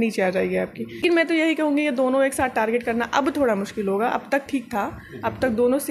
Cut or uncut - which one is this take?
cut